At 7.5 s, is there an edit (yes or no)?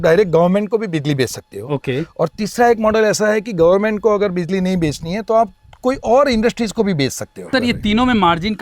yes